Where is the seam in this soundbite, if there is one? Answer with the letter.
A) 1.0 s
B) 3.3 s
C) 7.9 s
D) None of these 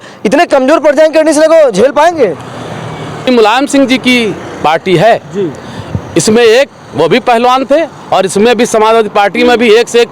B